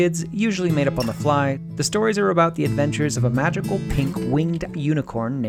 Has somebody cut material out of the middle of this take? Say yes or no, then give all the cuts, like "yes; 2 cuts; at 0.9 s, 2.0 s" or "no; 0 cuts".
yes; 1 cut; at 1.7 s